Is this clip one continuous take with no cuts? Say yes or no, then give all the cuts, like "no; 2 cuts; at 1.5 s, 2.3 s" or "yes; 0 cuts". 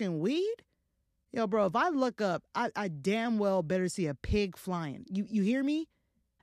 yes; 0 cuts